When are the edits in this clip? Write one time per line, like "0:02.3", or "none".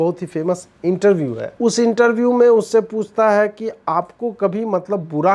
0:01.5